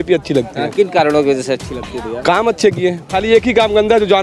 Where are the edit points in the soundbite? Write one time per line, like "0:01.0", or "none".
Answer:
0:03.1